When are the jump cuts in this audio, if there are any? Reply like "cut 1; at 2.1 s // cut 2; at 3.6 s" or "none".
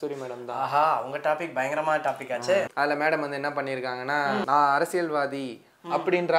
cut 1; at 2.7 s // cut 2; at 4.4 s